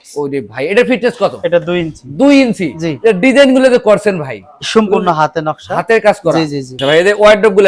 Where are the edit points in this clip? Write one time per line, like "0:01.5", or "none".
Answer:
0:06.7